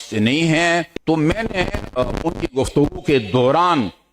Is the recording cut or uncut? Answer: cut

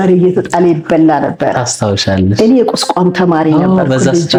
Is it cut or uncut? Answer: uncut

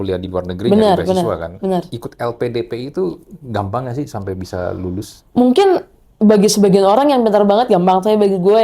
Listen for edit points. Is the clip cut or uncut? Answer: uncut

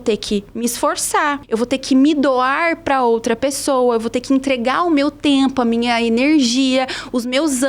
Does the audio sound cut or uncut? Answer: uncut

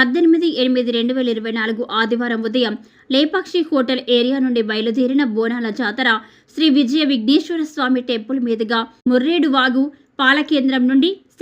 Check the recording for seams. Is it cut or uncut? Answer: cut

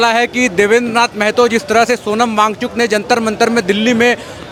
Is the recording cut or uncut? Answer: uncut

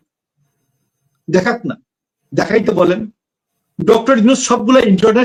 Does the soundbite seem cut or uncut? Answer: uncut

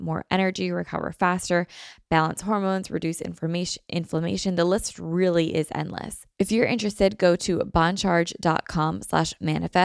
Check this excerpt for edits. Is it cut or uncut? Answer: cut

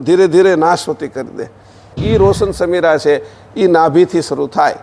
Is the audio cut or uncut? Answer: cut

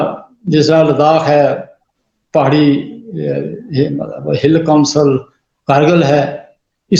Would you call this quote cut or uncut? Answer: uncut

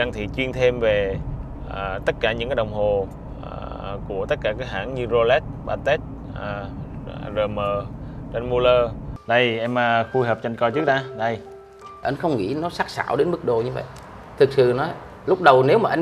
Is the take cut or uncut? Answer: cut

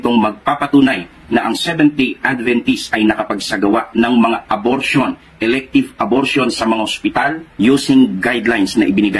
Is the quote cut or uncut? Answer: cut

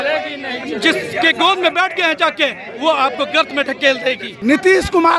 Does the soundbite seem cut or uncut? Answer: cut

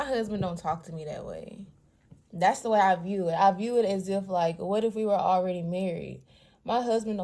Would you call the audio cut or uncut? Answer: uncut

